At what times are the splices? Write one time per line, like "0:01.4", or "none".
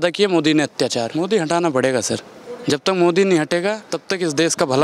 0:01.1
0:03.9